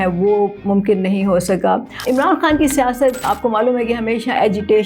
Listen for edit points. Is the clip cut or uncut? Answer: cut